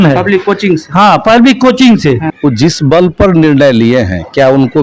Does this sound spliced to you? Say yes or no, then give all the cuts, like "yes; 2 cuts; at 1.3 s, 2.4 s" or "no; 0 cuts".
yes; 1 cut; at 2.3 s